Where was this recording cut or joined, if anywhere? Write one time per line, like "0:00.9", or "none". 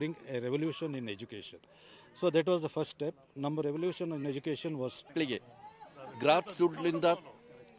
0:05.1